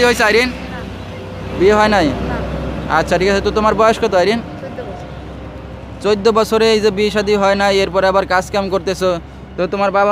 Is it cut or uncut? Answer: uncut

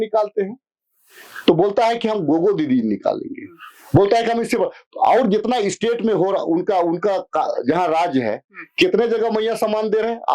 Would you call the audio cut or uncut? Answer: uncut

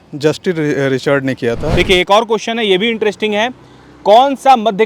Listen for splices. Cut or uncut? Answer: cut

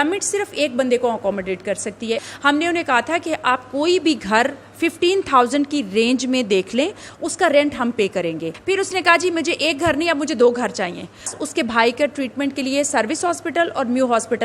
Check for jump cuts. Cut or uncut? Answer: cut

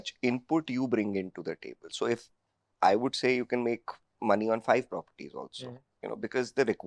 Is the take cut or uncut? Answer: uncut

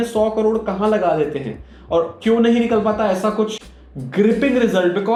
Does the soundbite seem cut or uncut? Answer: uncut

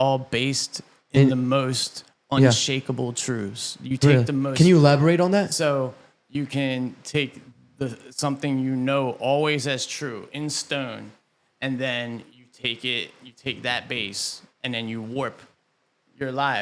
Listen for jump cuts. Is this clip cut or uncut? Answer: uncut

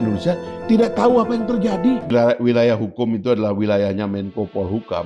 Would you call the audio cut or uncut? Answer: cut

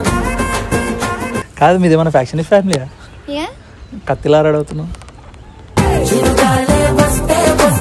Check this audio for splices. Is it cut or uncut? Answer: cut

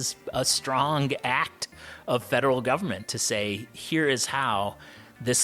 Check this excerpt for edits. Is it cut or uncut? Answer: uncut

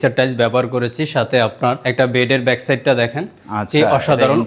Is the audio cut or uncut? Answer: uncut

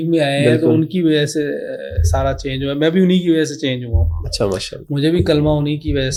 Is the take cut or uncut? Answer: uncut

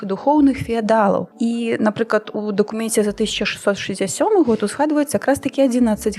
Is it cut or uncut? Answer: cut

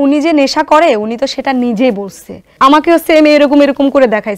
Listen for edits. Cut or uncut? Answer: cut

